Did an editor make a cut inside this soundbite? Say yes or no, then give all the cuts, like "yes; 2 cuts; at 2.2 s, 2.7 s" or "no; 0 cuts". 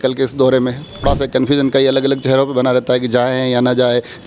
yes; 1 cut; at 1.0 s